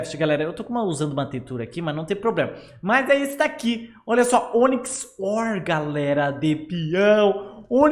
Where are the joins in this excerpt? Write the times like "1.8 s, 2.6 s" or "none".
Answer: none